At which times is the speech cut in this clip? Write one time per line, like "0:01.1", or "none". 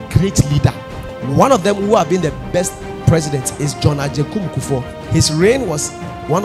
0:01.0